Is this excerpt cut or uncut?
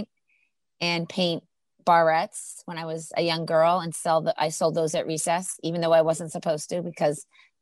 uncut